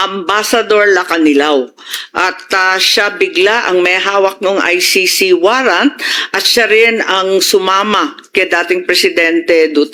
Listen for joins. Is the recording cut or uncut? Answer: uncut